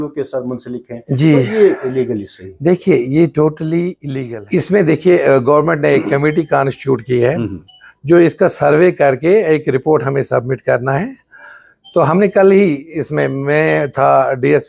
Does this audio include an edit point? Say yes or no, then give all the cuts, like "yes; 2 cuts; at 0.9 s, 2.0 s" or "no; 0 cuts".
yes; 1 cut; at 4.0 s